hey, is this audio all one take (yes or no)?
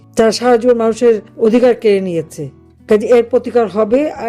no